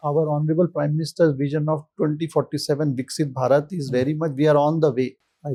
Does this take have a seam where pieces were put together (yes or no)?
no